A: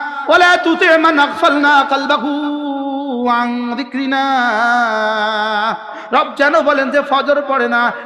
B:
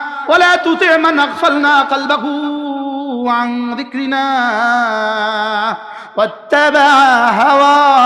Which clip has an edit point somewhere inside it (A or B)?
A